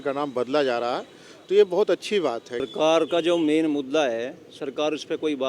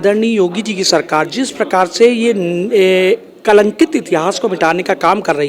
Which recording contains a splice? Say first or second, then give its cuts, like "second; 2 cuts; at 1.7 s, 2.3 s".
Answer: first; 1 cut; at 2.6 s